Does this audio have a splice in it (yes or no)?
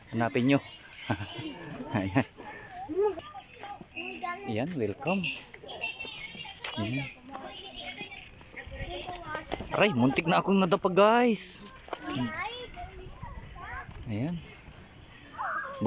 yes